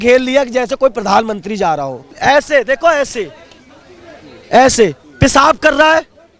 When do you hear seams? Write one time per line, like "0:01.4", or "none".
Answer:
0:02.0